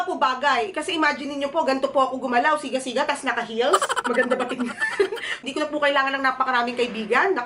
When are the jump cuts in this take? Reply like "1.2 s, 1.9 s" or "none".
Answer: 5.4 s